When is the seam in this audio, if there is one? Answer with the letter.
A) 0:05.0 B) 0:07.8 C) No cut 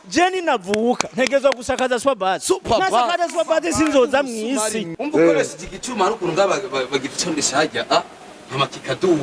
A